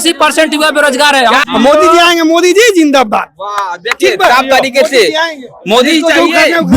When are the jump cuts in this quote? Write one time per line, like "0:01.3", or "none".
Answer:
0:01.5